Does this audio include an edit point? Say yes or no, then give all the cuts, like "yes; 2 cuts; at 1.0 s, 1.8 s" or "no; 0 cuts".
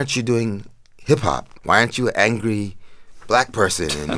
yes; 1 cut; at 1.5 s